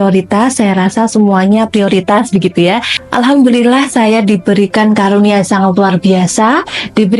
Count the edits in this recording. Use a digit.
1